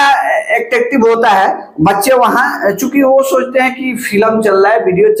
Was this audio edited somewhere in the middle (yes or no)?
no